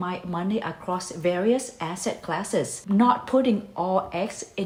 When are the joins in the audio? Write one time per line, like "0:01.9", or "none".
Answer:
none